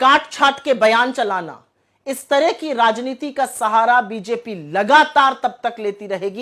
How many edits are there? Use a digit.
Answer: 0